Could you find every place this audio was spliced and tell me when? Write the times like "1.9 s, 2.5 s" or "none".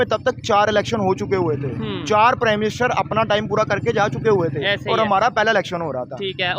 none

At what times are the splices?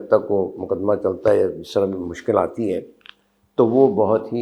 none

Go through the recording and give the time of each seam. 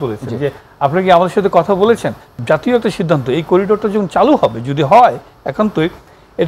2.3 s

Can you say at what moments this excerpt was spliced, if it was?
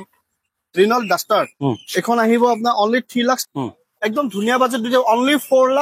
3.4 s

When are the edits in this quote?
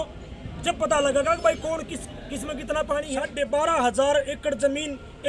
3.3 s

